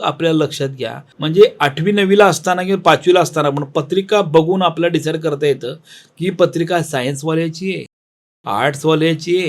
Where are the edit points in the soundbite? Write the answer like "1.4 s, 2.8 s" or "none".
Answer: 1.1 s